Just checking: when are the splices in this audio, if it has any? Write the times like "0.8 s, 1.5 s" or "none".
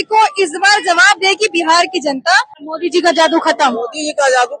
2.6 s